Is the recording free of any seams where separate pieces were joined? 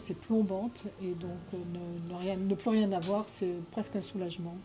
yes; 0 cuts

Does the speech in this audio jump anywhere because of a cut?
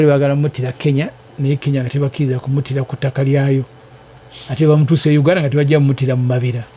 no; 0 cuts

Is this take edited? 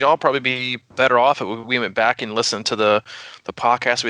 yes; 1 cut; at 0.9 s

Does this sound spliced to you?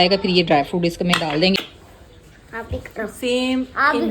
yes; 1 cut; at 1.6 s

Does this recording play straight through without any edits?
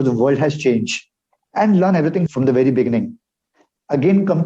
no; 1 cut; at 2.3 s

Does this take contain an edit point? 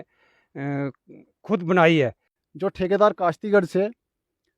yes; 1 cut; at 2.3 s

